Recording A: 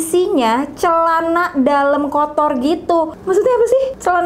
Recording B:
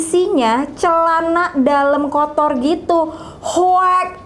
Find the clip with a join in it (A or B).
A